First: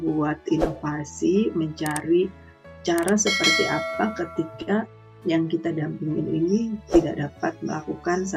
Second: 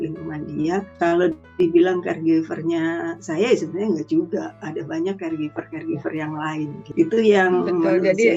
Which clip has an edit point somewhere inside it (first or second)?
second